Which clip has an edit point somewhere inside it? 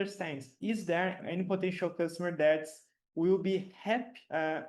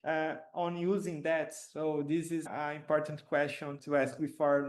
second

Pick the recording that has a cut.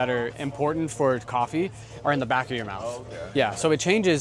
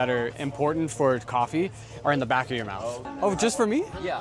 second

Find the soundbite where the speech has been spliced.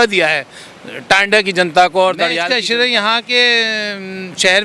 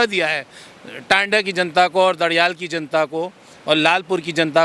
first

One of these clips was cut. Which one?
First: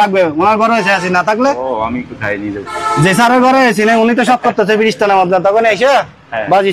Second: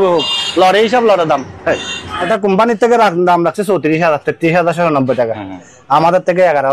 second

